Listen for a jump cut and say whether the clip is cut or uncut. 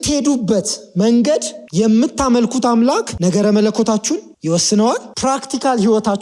cut